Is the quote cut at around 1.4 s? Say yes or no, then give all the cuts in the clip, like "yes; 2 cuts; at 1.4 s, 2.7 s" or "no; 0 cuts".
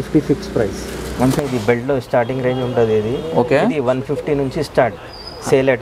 yes; 1 cut; at 1.4 s